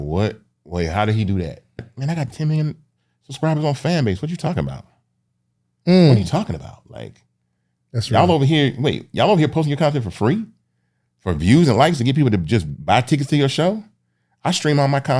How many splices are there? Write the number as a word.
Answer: one